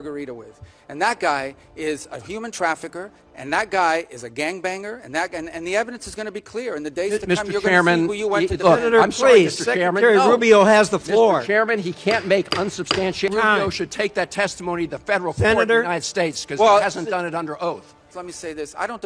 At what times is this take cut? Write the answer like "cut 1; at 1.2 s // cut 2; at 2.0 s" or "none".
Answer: cut 1; at 13.3 s // cut 2; at 18.0 s